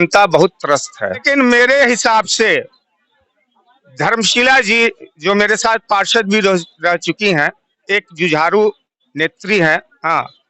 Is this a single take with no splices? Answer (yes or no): no